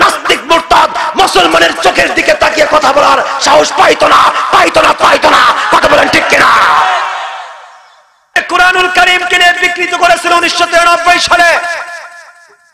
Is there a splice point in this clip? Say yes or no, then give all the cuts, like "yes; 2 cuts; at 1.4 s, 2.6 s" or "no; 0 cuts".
yes; 1 cut; at 8.4 s